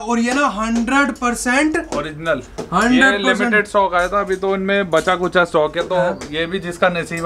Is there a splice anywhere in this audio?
no; 0 cuts

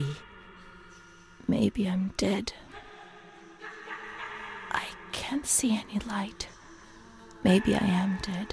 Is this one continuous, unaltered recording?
yes; 0 cuts

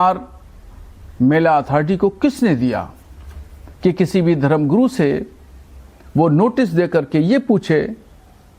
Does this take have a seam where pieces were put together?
yes; 1 cut; at 1.5 s

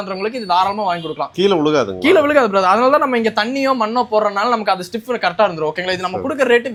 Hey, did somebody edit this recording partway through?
no; 0 cuts

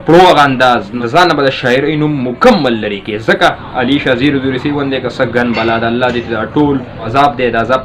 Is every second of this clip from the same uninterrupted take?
no; 3 cuts; at 0.9 s, 3.7 s, 7.0 s

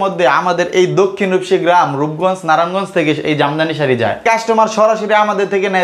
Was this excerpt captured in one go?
no; 1 cut; at 4.2 s

